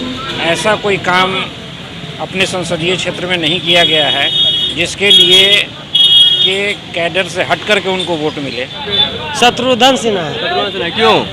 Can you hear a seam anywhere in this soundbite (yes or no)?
yes